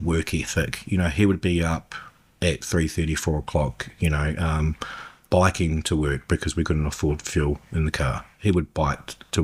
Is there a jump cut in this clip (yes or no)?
no